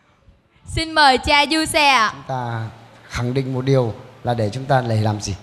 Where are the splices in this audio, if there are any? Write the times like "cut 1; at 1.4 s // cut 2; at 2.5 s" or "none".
cut 1; at 2.2 s